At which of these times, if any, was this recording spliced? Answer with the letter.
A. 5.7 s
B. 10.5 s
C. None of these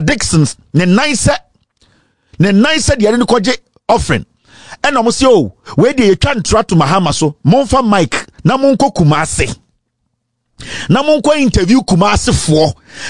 C